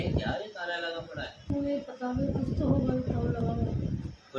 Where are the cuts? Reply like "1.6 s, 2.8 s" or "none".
1.5 s